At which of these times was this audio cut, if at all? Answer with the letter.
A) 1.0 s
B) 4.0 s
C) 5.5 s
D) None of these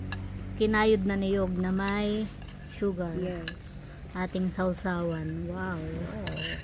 D